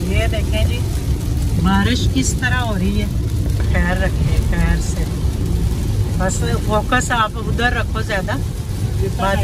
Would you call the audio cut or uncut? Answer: cut